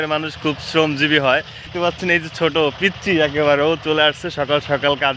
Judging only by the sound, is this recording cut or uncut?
cut